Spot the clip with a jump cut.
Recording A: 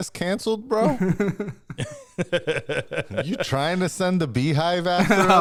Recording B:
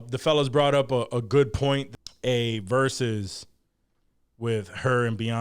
B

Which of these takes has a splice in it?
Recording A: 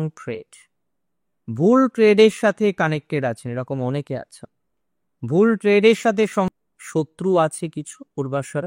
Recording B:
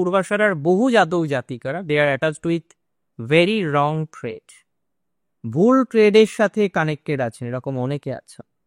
A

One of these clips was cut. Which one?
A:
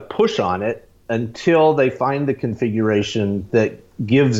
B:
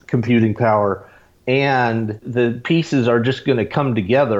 B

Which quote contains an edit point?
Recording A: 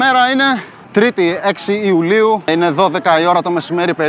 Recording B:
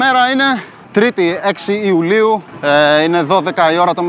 A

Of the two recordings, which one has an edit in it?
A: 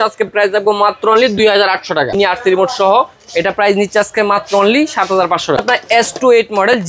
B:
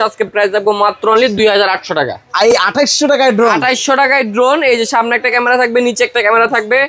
A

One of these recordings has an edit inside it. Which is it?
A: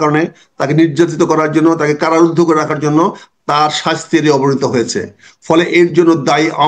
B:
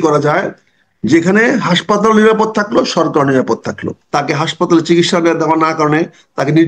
B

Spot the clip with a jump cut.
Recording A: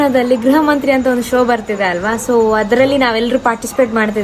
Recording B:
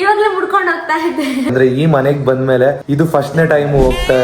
B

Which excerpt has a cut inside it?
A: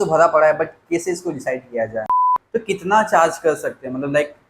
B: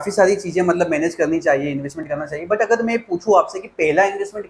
A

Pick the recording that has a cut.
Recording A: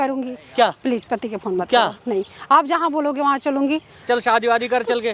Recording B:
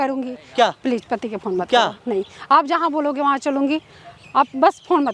A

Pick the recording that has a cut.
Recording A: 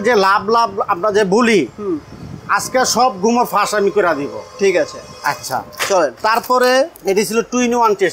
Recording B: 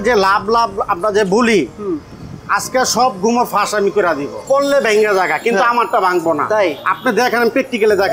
B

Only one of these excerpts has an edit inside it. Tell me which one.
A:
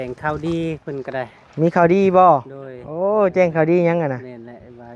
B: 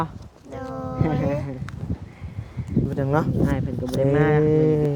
B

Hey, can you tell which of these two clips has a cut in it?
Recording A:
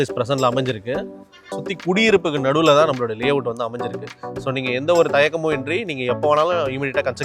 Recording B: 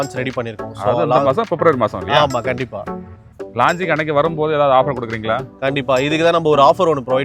A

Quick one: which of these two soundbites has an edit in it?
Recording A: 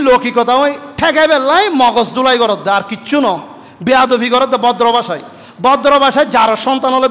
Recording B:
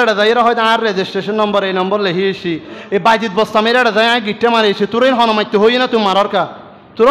B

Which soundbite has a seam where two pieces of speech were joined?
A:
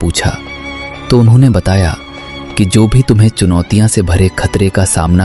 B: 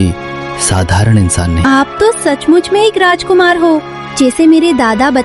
B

